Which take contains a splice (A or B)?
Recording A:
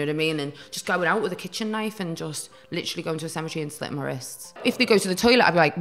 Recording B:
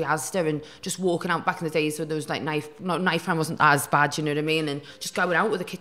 A